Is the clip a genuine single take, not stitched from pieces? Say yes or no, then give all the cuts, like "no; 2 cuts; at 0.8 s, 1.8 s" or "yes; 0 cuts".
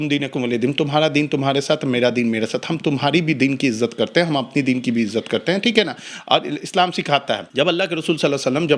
no; 1 cut; at 7.5 s